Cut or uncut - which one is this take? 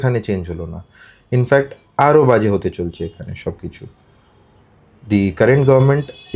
uncut